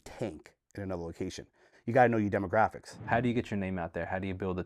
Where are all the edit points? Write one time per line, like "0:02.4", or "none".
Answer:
0:02.9